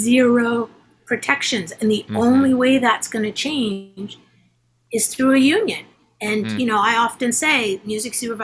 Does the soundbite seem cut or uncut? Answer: uncut